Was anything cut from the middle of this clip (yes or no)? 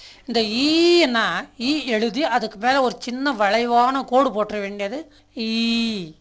yes